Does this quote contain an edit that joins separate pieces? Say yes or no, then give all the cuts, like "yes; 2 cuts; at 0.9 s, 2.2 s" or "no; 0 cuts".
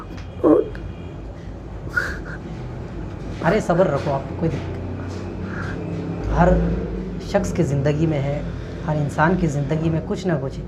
yes; 1 cut; at 6.2 s